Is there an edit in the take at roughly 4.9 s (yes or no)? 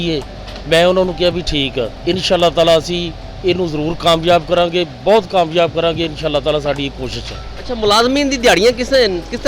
no